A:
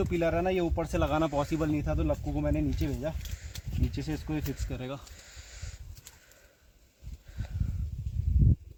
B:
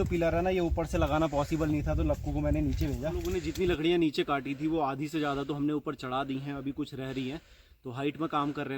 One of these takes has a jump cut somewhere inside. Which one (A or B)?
B